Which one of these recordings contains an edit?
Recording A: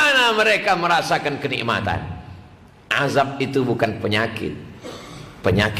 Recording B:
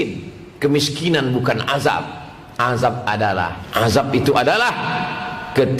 B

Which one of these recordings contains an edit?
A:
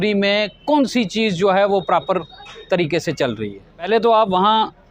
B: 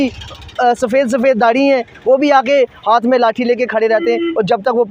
A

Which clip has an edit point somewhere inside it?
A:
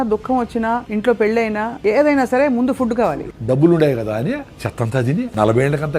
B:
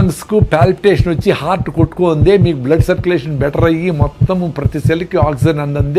A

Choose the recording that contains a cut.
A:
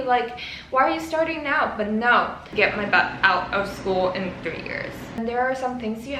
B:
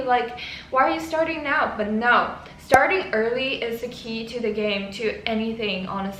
A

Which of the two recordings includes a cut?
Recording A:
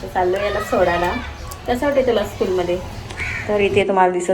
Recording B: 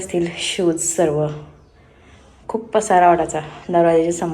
A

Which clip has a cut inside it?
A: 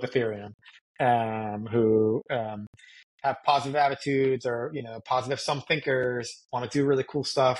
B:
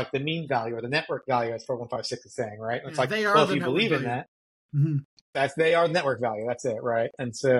B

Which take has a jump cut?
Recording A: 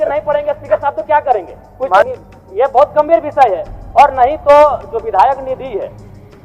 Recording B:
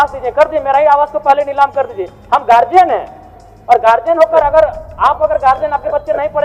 A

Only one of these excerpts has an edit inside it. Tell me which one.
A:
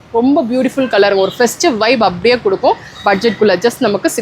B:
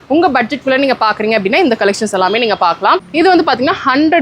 B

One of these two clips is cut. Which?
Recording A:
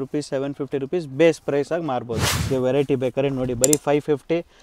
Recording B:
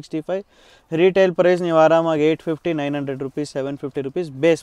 A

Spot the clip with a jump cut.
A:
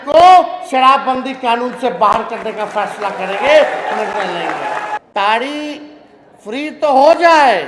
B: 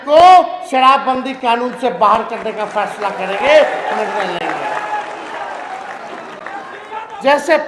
A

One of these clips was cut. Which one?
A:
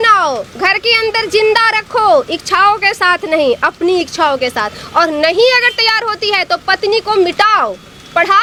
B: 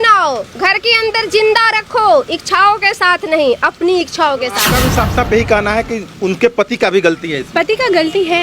B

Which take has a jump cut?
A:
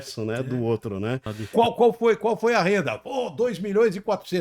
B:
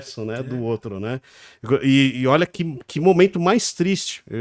A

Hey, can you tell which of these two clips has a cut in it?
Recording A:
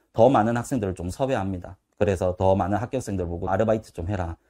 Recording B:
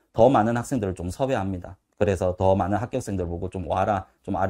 A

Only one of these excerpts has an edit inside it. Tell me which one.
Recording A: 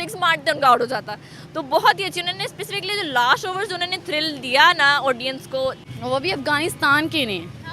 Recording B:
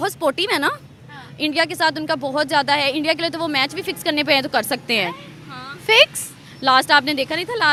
A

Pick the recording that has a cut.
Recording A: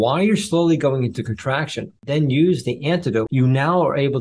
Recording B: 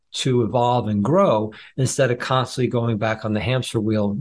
A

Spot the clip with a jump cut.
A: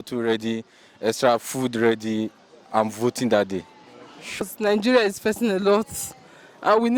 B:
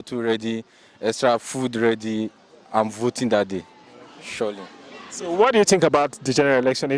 A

